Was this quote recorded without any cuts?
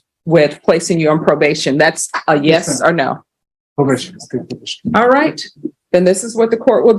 yes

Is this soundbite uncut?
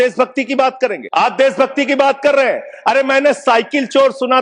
no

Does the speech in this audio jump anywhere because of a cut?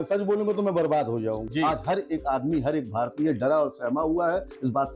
yes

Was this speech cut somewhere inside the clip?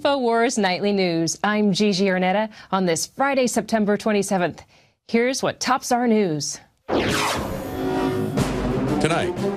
no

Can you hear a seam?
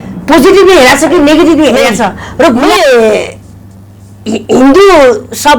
yes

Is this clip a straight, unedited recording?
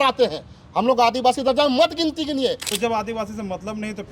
no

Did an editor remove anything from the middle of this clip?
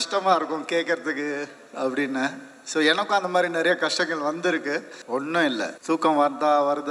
yes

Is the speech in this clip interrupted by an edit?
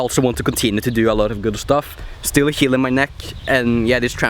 no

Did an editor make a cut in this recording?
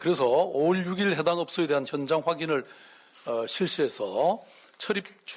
no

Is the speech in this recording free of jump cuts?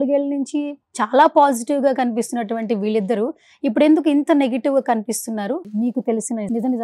no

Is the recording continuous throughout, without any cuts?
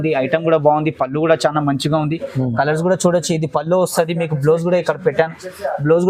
yes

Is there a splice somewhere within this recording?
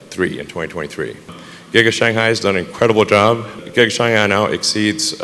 yes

